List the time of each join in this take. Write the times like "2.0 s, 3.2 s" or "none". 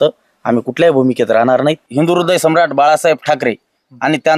1.8 s

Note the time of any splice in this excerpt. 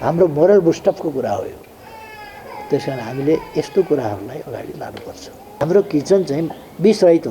5.6 s

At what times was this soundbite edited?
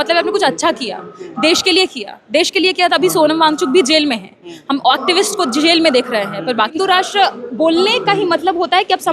6.8 s

